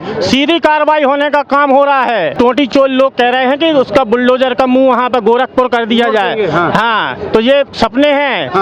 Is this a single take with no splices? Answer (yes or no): no